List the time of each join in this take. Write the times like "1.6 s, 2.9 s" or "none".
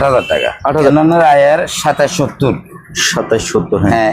0.9 s